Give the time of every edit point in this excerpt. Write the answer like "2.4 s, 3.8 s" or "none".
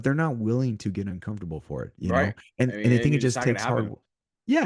1.9 s